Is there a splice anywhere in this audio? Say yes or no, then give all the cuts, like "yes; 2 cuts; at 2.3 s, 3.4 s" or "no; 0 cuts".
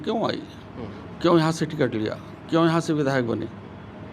no; 0 cuts